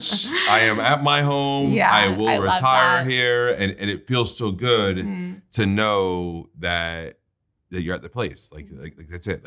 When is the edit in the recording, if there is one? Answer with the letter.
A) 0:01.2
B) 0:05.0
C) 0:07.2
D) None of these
D